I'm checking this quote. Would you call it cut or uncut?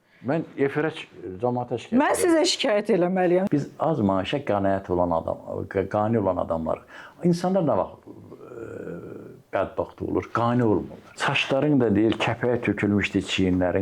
cut